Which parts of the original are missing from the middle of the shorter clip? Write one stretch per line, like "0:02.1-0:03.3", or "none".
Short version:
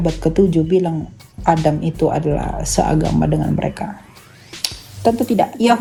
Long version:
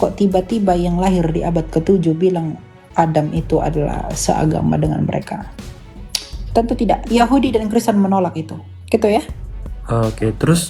none